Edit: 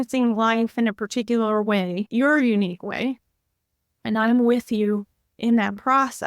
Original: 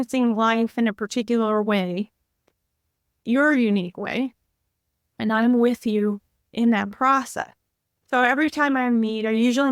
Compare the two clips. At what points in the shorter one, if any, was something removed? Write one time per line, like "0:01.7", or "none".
0:02.1